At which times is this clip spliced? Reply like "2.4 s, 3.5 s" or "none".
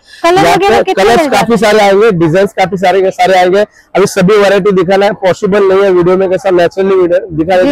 none